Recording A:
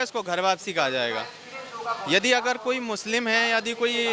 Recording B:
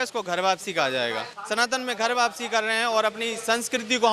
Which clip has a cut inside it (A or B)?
B